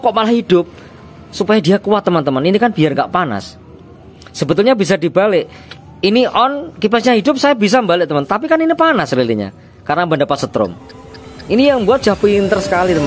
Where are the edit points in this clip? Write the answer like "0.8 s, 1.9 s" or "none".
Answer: none